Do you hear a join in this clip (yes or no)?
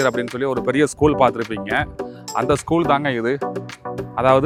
no